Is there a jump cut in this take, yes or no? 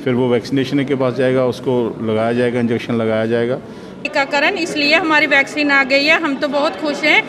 yes